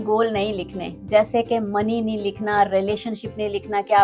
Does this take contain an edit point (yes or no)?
no